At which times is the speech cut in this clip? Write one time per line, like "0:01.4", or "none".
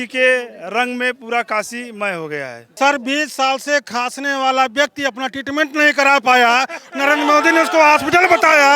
0:02.8

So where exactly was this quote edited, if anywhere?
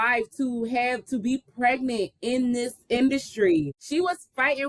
0:03.8

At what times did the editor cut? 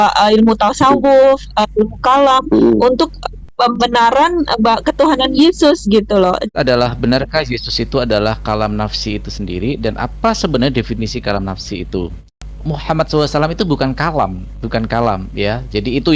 0:06.5
0:12.5

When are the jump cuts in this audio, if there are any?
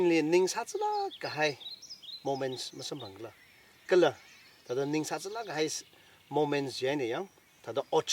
none

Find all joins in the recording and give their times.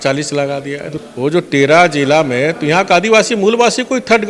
0:01.0

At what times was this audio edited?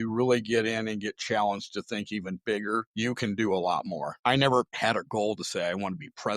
0:02.9
0:04.1
0:04.7

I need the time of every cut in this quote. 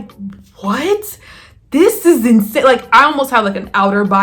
none

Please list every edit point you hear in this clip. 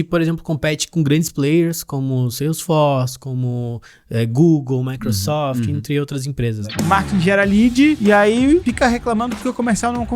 0:06.6
0:08.0
0:08.6

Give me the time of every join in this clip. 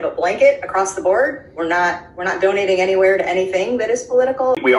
none

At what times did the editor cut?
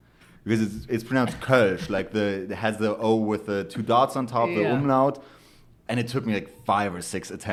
none

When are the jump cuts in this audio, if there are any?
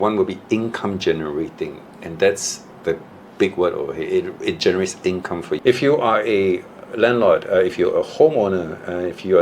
0:05.5

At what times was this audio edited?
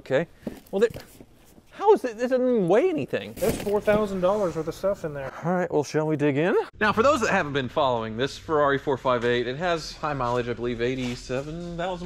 none

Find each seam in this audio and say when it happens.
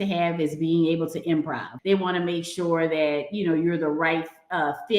0:01.7

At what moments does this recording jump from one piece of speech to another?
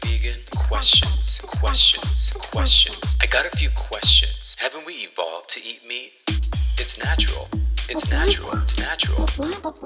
none

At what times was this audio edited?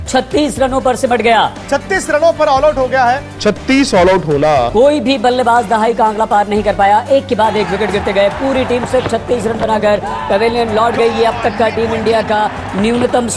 none

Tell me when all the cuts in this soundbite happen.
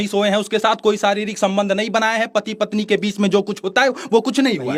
none

